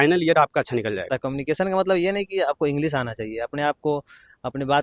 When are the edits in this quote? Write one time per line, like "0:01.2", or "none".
0:01.1